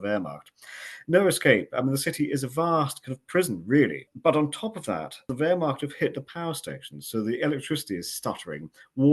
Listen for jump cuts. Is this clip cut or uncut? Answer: cut